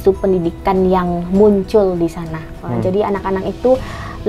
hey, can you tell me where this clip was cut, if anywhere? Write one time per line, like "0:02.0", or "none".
0:02.6